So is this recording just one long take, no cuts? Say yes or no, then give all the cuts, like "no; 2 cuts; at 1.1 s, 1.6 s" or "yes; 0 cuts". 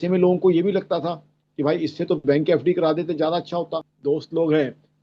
no; 1 cut; at 3.9 s